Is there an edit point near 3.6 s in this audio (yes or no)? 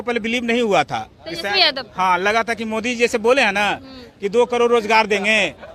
no